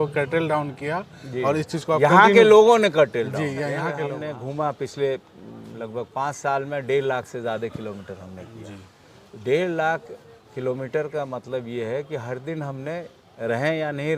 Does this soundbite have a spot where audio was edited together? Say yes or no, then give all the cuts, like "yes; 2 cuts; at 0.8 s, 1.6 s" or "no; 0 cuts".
yes; 1 cut; at 4.0 s